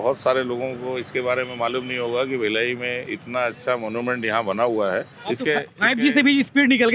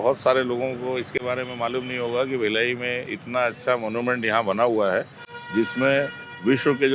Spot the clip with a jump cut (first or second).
first